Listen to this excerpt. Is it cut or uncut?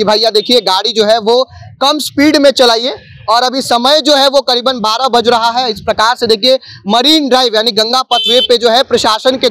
uncut